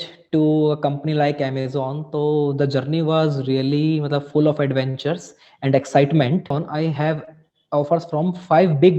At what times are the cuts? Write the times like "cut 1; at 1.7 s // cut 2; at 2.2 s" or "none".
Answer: cut 1; at 6.5 s

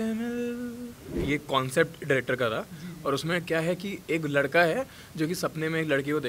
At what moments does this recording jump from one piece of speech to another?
cut 1; at 1.2 s

